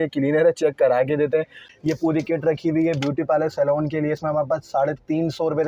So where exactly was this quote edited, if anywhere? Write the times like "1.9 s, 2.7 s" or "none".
1.7 s